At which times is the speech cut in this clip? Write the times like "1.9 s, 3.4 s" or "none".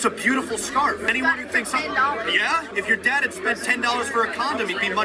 1.1 s, 2.7 s